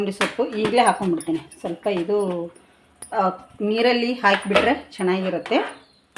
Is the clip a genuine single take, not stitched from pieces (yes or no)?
yes